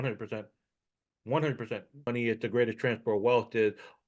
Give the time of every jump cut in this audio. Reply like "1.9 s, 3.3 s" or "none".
2.1 s